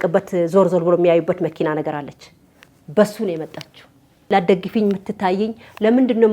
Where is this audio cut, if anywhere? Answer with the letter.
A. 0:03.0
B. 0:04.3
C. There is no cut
B